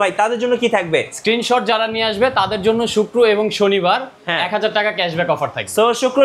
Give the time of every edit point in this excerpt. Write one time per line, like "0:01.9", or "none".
none